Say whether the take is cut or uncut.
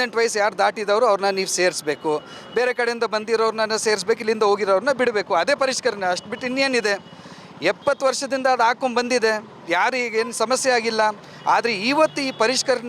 uncut